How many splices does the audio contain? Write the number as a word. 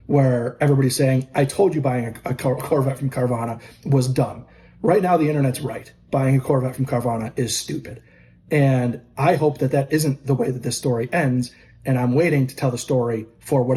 zero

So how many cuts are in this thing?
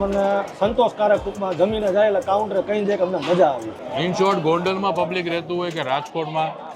one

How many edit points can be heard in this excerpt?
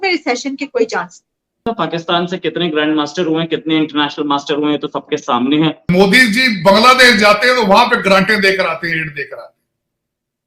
two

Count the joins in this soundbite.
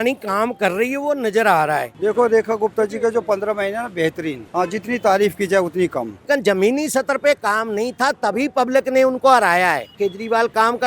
four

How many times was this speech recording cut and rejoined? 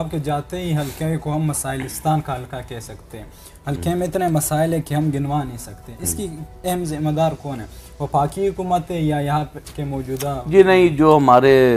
zero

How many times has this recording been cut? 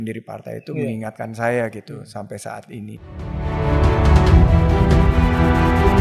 one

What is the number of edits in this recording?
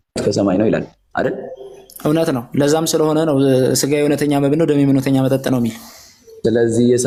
zero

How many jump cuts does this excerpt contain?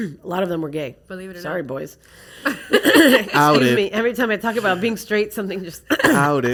zero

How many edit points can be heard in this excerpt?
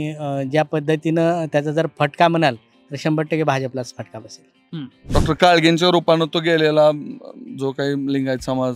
one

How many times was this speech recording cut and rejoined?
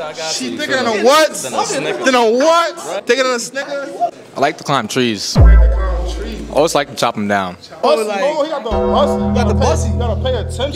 three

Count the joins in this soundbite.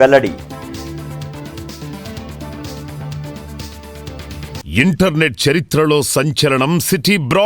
one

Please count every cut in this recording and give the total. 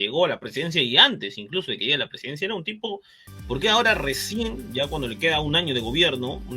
one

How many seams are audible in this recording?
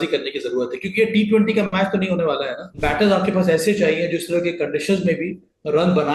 one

